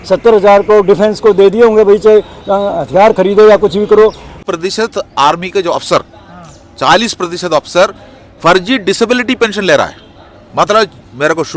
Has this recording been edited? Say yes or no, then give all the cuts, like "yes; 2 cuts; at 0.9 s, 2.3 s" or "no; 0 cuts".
yes; 1 cut; at 4.3 s